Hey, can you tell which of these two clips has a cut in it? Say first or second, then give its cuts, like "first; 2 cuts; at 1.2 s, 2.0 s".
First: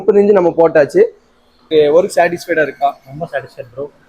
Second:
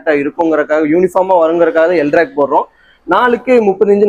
first; 1 cut; at 1.7 s